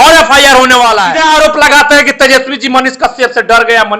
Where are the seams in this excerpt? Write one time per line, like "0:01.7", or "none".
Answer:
0:01.1